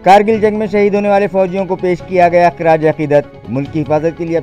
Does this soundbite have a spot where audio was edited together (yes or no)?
no